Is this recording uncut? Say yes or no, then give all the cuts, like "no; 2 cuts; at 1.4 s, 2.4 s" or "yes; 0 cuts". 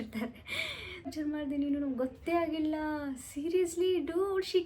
no; 1 cut; at 1.1 s